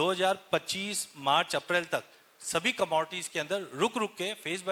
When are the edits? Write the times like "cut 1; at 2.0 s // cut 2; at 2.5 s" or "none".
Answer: none

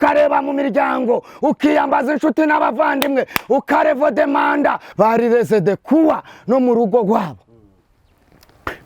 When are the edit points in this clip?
cut 1; at 4.8 s

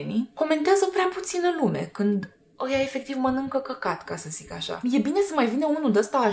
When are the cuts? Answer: none

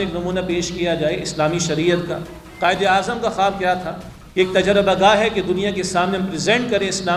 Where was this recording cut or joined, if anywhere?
none

